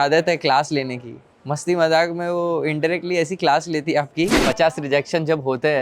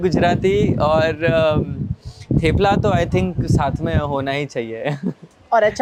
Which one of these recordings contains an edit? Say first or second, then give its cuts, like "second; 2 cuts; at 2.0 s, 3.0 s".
first; 1 cut; at 4.4 s